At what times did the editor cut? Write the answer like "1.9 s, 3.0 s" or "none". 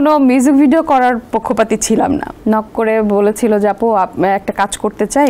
2.3 s